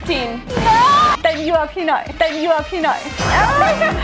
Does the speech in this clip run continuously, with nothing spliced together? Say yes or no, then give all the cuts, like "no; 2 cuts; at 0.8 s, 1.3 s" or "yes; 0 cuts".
no; 1 cut; at 1.2 s